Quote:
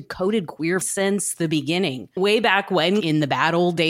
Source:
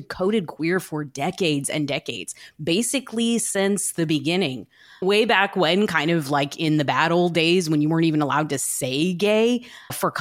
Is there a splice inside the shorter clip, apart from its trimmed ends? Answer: yes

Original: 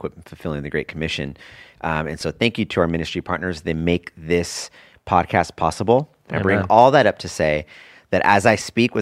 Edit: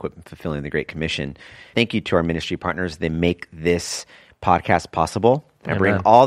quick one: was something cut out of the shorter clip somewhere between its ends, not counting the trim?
yes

